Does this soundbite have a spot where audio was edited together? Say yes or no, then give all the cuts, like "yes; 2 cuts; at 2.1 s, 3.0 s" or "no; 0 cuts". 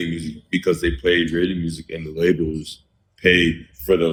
no; 0 cuts